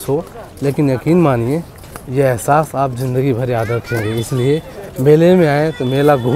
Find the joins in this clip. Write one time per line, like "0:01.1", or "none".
none